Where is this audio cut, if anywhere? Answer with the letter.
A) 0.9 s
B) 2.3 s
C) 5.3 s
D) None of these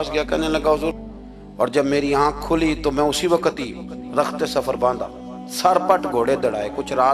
A